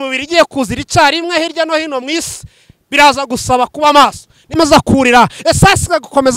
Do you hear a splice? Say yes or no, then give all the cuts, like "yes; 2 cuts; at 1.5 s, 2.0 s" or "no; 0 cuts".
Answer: yes; 1 cut; at 4.6 s